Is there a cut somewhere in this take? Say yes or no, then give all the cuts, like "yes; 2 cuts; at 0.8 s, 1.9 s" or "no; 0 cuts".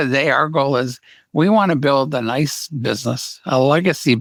no; 0 cuts